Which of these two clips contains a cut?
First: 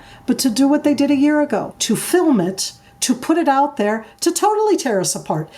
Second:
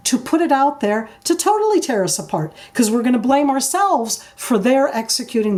first; 1 cut; at 1.7 s

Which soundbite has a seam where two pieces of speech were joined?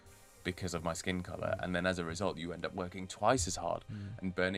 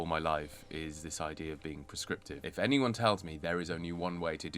second; 1 cut; at 2.4 s

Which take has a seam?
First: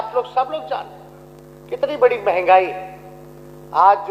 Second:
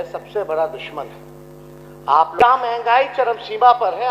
second; 1 cut; at 2.4 s

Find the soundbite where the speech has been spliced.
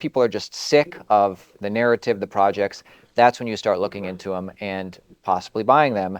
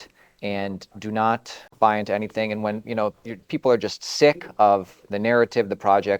second; 1 cut; at 1.7 s

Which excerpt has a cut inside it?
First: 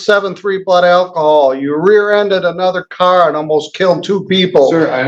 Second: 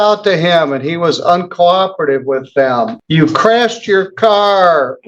second; 1 cut; at 3.0 s

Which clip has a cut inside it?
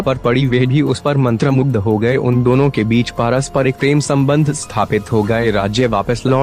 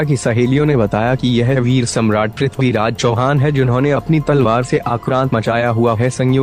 second; 1 cut; at 4.2 s

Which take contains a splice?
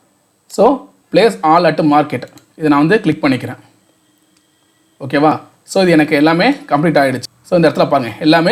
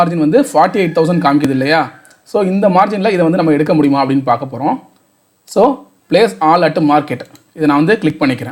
first; 1 cut; at 7.3 s

